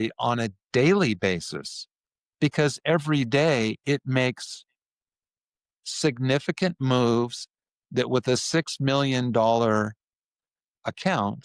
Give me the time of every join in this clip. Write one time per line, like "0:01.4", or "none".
none